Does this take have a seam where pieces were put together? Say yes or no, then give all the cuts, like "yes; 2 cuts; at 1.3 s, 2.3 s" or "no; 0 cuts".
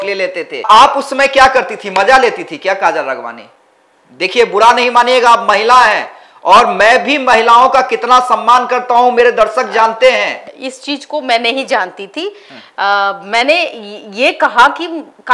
no; 0 cuts